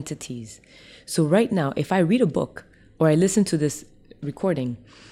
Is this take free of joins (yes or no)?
yes